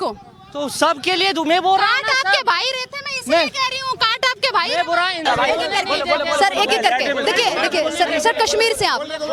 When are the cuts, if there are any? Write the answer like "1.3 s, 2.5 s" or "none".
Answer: 5.2 s